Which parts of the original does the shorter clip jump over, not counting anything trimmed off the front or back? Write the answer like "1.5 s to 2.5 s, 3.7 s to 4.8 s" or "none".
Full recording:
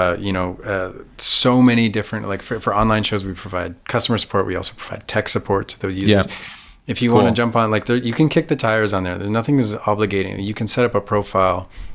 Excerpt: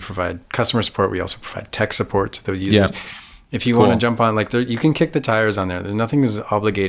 none